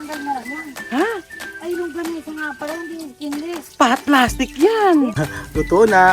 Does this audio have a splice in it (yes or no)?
yes